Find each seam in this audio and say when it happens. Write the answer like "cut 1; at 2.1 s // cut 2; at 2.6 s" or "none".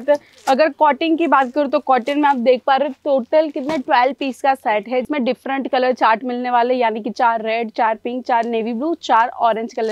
cut 1; at 5.1 s

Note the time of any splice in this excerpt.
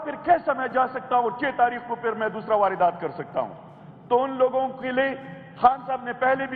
none

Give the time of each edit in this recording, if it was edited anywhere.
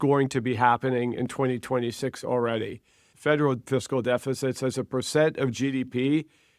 cut 1; at 3.1 s

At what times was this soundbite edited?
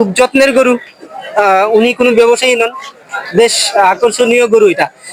none

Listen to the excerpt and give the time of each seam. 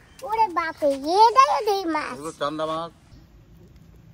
cut 1; at 3.1 s

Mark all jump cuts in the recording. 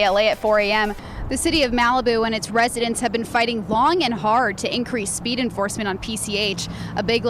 cut 1; at 1.0 s

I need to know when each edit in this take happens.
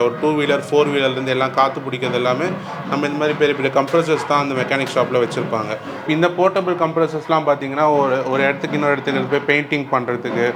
none

